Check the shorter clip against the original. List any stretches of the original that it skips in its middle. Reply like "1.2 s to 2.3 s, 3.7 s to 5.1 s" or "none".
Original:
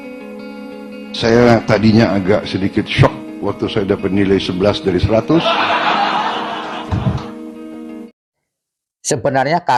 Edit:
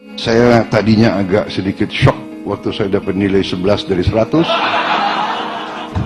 none